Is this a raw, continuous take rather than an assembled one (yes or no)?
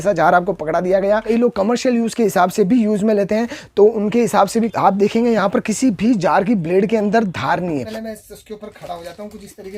no